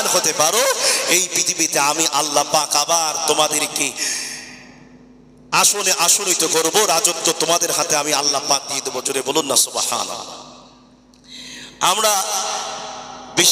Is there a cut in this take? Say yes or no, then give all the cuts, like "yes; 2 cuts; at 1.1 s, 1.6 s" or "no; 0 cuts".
no; 0 cuts